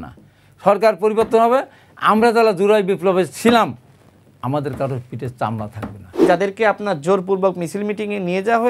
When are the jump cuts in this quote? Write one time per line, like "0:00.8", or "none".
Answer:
0:06.2